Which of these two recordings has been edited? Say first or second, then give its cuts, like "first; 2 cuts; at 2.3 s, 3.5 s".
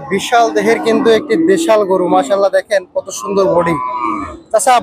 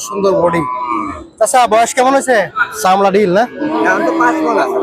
second; 1 cut; at 2.6 s